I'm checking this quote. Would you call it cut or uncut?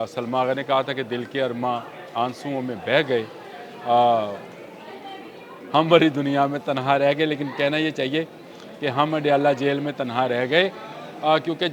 uncut